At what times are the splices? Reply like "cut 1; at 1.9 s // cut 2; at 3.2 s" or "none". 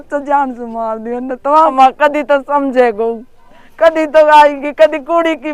cut 1; at 1.7 s